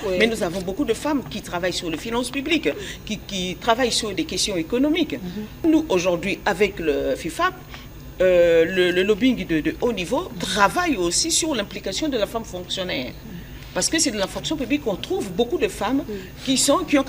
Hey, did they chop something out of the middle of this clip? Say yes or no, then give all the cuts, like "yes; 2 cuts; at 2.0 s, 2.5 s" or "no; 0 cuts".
yes; 1 cut; at 5.6 s